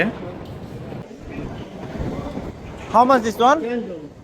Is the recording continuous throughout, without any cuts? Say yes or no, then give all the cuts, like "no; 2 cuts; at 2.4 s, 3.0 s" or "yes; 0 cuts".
no; 1 cut; at 1.1 s